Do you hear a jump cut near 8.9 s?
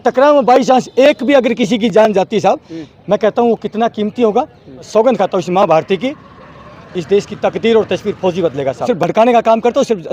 yes; 2 cuts; at 4.8 s, 8.9 s

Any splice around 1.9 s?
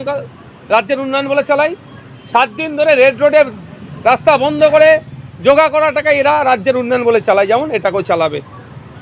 no; 0 cuts

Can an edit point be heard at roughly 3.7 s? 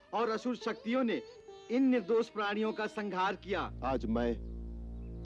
yes; 1 cut; at 3.7 s

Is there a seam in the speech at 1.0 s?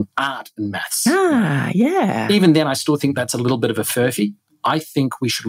no; 1 cut; at 2.2 s

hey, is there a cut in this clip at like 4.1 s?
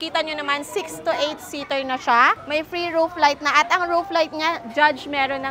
no; 1 cut; at 2.4 s

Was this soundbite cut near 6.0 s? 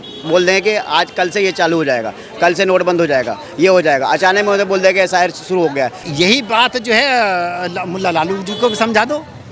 yes; 1 cut; at 6.0 s

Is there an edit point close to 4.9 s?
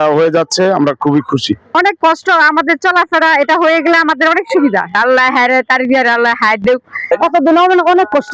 yes; 3 cuts; at 1.7 s, 4.9 s, 7.0 s

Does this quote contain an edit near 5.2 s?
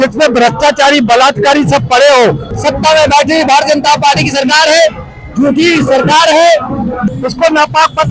no; 2 cuts; at 2.5 s, 7.0 s

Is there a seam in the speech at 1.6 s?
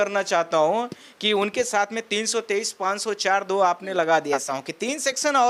no; 1 cut; at 4.4 s

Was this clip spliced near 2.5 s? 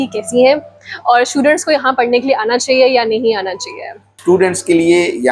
no; 1 cut; at 4.1 s

